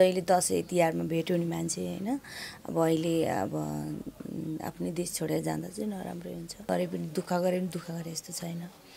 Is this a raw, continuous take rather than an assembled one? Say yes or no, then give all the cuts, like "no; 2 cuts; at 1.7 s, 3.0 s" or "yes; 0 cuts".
no; 1 cut; at 6.7 s